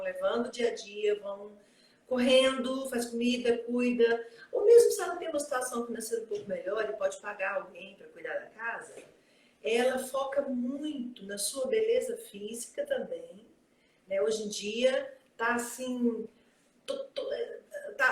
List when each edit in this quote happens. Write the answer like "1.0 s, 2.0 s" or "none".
none